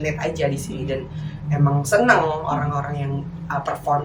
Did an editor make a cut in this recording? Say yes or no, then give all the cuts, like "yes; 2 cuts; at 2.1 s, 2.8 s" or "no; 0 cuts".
no; 0 cuts